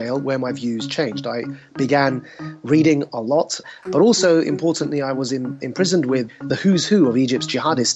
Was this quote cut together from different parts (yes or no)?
yes